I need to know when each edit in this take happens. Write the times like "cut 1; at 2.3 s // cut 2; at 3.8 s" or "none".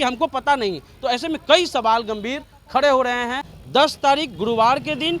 cut 1; at 3.5 s